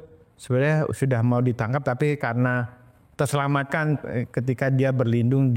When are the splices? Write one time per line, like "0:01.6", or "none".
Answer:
none